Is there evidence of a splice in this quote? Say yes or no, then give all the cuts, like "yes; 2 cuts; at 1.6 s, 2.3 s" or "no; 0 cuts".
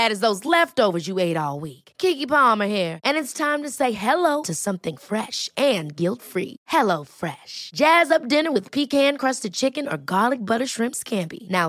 no; 0 cuts